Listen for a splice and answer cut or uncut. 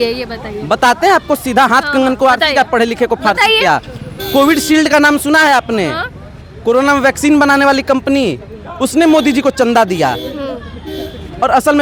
uncut